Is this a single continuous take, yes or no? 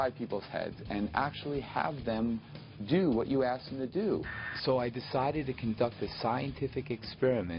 no